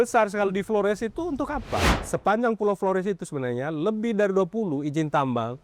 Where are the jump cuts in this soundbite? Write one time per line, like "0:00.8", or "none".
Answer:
0:01.9